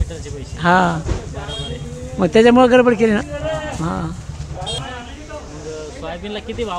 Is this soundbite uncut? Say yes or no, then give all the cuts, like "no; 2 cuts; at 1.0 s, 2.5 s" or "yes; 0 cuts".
no; 1 cut; at 4.8 s